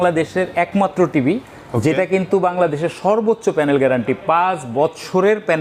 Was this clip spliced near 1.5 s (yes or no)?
no